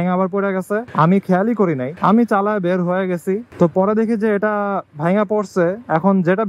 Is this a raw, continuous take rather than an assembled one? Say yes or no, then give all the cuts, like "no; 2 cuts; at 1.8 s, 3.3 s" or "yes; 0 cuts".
no; 3 cuts; at 0.9 s, 1.9 s, 3.5 s